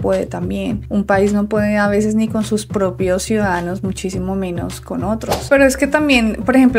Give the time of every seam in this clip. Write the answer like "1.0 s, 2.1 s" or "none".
5.5 s